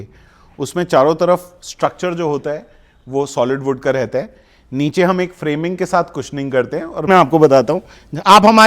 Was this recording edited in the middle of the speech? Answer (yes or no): yes